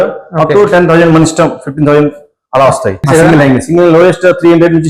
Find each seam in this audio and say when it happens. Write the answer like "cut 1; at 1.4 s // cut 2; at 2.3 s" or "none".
cut 1; at 3.0 s